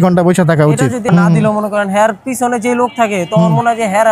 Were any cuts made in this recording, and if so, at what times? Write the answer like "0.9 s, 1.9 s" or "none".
1.1 s